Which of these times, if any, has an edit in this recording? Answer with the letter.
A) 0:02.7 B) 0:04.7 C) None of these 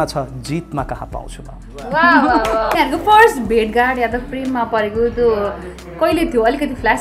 A